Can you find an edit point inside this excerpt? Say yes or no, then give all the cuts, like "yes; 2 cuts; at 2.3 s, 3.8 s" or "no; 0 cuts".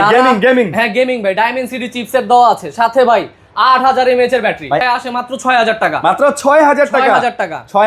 yes; 1 cut; at 4.8 s